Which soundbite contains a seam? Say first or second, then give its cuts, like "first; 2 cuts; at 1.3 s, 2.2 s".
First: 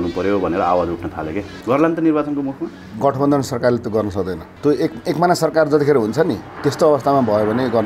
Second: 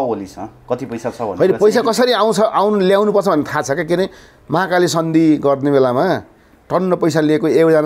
first; 4 cuts; at 1.5 s, 2.9 s, 4.4 s, 6.5 s